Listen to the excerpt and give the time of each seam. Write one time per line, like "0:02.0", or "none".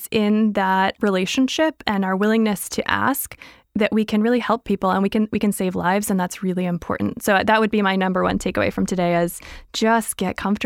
0:00.9